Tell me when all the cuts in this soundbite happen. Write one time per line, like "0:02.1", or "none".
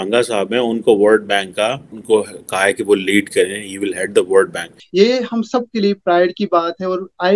0:01.9
0:04.8

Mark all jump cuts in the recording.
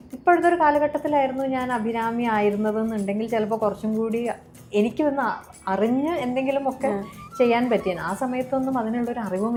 none

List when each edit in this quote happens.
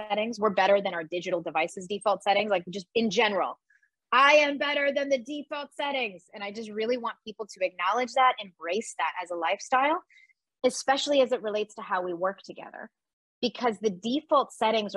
none

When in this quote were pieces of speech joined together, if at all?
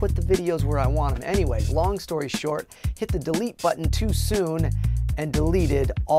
0:03.2

